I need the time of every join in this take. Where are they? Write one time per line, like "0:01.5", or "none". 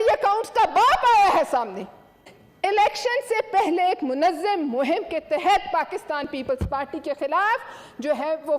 0:02.1